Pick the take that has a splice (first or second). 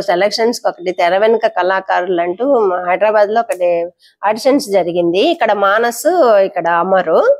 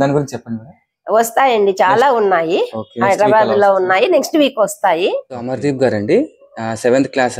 second